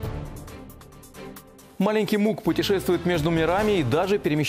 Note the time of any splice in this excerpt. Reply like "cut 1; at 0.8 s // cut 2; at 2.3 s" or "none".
cut 1; at 1.7 s